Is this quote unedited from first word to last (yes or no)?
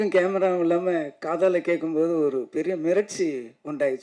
yes